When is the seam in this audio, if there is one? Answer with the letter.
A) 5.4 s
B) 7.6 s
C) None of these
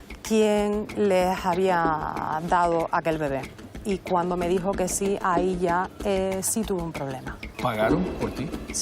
B